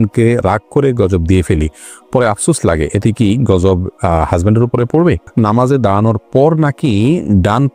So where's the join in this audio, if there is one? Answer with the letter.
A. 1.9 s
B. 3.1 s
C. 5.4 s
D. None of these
C